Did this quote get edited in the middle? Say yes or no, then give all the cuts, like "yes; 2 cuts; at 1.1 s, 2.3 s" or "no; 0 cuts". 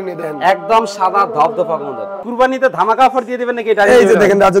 yes; 1 cut; at 2.3 s